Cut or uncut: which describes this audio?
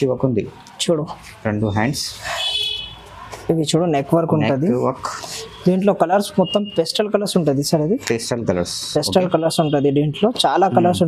uncut